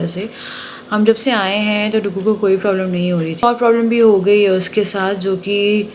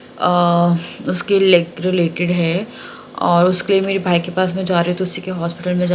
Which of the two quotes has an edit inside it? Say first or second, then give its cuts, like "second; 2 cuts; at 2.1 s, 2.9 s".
first; 1 cut; at 3.4 s